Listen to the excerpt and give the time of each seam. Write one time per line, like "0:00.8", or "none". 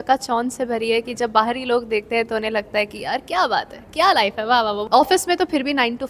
0:04.8